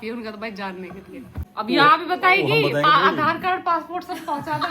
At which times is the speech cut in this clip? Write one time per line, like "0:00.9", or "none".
0:01.4